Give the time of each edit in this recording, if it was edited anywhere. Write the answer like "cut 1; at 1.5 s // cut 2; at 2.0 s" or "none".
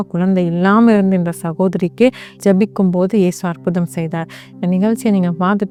none